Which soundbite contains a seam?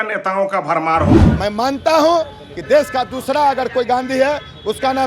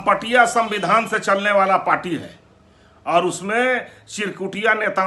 first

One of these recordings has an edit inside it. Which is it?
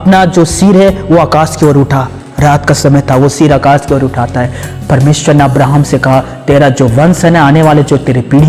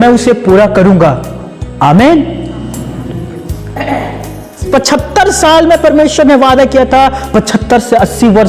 second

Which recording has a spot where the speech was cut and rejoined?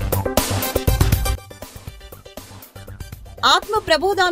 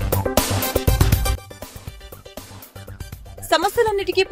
second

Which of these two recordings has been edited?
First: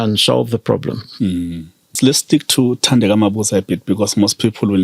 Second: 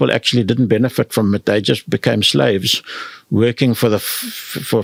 first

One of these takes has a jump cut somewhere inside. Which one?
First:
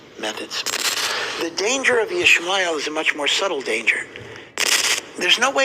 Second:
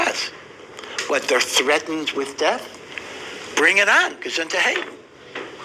first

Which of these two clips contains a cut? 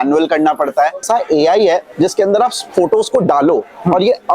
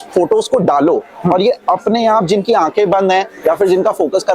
first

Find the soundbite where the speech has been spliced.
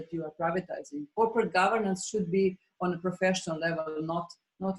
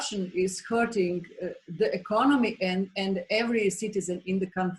first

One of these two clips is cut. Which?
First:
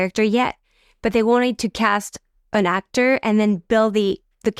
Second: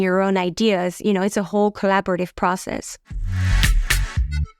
second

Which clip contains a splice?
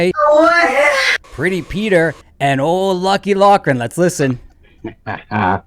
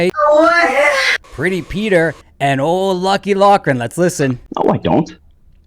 second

